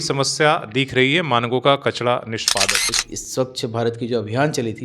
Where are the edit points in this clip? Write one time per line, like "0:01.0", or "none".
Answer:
0:02.8